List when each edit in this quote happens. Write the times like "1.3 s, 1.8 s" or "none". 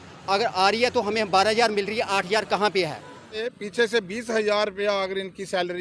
3.6 s